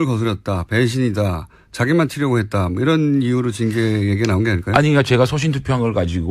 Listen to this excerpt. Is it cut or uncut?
uncut